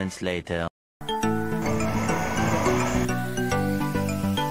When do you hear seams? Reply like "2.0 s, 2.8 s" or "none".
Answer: 1.0 s